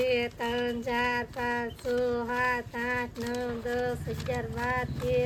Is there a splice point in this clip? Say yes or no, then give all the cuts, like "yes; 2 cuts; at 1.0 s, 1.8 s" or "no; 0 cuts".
no; 0 cuts